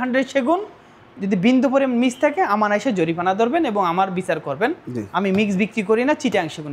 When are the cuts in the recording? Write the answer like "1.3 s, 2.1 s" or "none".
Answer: none

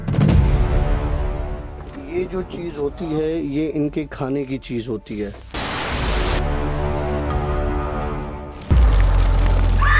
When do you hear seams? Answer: none

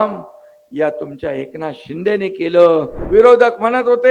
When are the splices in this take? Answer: 3.0 s

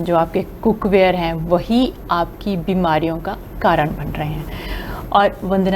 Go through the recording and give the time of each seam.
none

